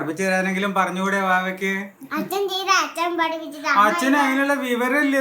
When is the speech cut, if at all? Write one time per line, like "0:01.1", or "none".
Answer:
0:02.0

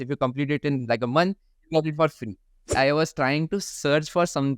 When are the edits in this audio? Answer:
0:02.7

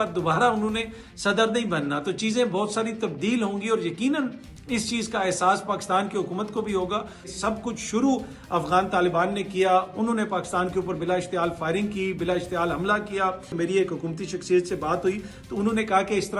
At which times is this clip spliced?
0:07.3
0:13.5

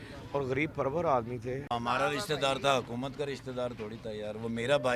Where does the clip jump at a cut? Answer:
0:01.6

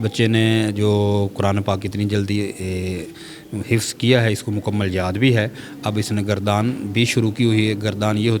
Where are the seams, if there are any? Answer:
none

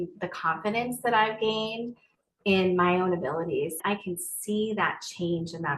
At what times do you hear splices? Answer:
0:03.8

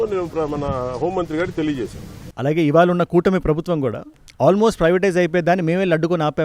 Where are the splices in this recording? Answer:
0:02.3

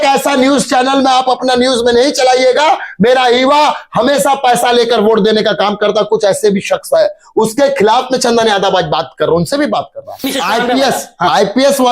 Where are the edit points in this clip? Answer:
0:10.3

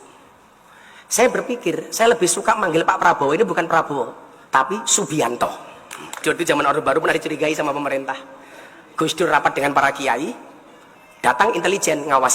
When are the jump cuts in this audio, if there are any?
0:06.2

